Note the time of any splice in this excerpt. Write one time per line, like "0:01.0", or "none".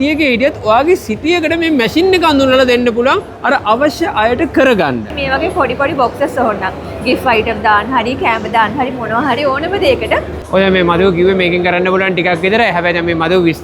0:05.1
0:10.4